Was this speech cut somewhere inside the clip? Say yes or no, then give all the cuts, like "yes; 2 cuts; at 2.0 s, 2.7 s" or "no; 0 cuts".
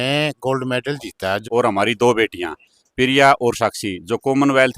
yes; 1 cut; at 1.4 s